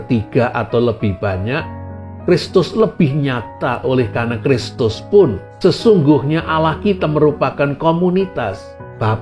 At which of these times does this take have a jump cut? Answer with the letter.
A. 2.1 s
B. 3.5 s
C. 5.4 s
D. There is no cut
C